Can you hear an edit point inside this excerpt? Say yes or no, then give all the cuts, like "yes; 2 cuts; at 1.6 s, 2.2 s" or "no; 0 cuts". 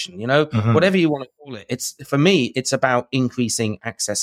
no; 0 cuts